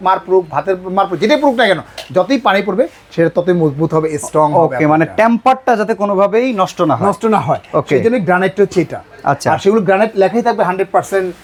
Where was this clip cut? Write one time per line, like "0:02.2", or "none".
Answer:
none